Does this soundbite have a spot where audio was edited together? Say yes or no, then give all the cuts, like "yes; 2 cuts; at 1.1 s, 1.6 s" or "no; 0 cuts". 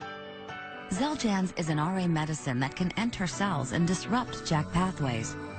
no; 0 cuts